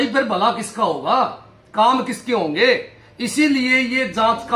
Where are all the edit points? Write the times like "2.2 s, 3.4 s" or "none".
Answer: none